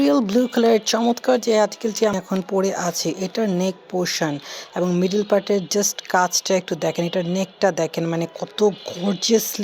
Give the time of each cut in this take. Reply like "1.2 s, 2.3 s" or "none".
2.0 s

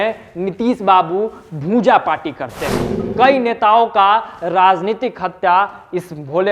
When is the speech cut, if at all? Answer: 3.0 s

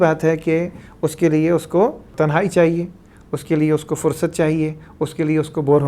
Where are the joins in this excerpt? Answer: 2.1 s

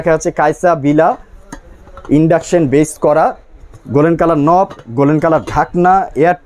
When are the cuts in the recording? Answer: none

